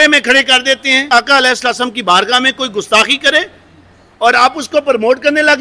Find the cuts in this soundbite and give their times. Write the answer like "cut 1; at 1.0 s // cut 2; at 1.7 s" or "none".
cut 1; at 1.0 s